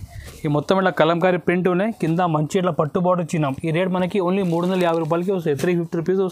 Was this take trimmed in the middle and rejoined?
no; 0 cuts

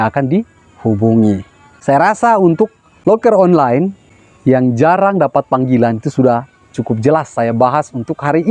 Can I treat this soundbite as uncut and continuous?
yes; 0 cuts

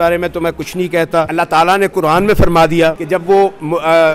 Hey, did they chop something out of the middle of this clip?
yes; 2 cuts; at 1.3 s, 3.0 s

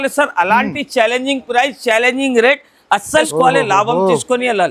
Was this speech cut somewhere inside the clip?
yes; 1 cut; at 3.3 s

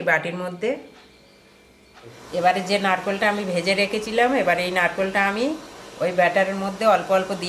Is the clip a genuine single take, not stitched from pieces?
no; 1 cut; at 2.2 s

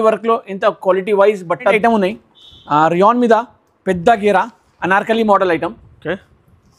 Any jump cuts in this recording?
yes; 1 cut; at 1.7 s

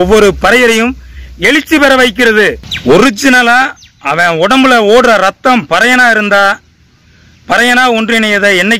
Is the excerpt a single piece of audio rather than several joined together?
no; 1 cut; at 2.7 s

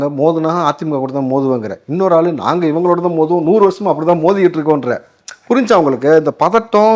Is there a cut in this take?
no; 0 cuts

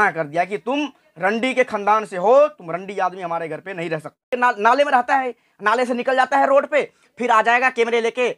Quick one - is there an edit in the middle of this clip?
yes; 1 cut; at 4.2 s

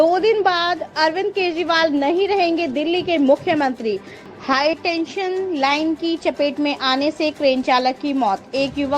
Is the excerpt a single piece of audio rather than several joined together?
no; 1 cut; at 4.1 s

